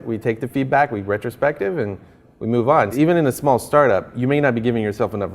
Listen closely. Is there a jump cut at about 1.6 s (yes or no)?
no